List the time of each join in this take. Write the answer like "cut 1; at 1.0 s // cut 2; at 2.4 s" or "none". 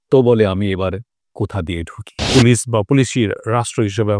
cut 1; at 2.3 s